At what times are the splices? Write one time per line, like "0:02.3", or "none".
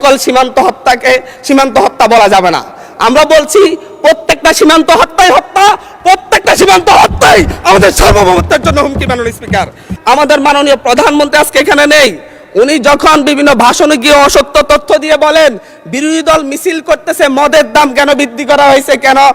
0:09.9